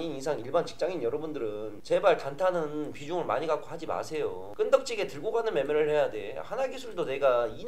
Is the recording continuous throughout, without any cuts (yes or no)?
yes